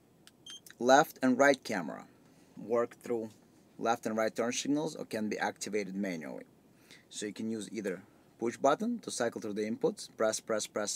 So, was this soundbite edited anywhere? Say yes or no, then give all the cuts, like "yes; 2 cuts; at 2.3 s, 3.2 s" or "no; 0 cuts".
no; 0 cuts